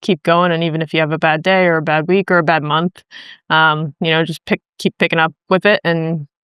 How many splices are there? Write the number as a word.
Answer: zero